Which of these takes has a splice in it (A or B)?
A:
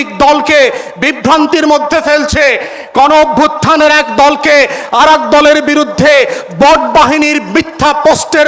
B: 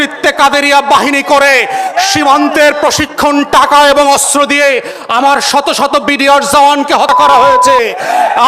B